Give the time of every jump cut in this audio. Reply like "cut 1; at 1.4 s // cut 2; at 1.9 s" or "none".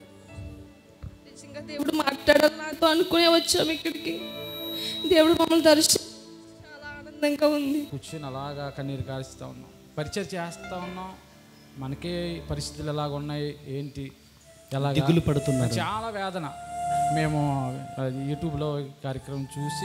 cut 1; at 8.0 s